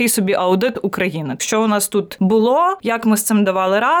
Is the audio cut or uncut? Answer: cut